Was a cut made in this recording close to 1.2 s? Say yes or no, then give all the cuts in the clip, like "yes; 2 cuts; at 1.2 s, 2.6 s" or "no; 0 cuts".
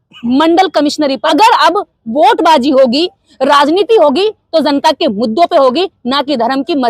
yes; 1 cut; at 1.2 s